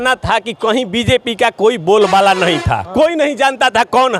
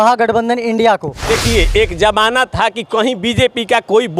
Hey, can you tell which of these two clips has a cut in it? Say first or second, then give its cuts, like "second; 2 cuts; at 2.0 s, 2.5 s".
second; 1 cut; at 1.1 s